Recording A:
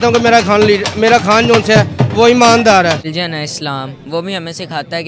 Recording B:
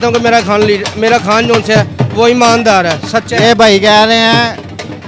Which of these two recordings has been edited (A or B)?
A